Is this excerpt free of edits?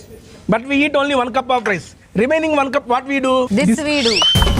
no; 1 cut; at 3.5 s

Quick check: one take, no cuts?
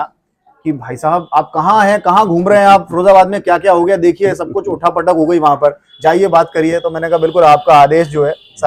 yes; 0 cuts

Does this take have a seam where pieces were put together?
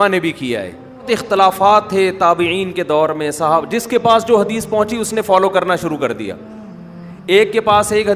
yes; 1 cut; at 1.1 s

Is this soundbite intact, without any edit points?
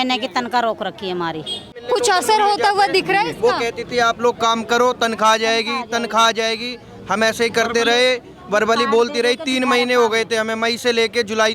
yes; 0 cuts

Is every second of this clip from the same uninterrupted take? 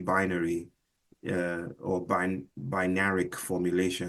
yes; 0 cuts

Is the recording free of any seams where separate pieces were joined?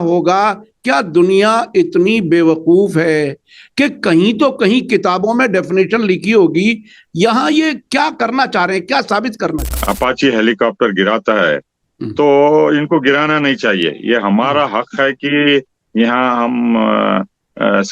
no; 1 cut; at 9.7 s

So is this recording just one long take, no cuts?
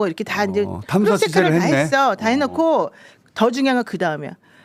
yes; 0 cuts

